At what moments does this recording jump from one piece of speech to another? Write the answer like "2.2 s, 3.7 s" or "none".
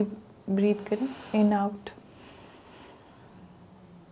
none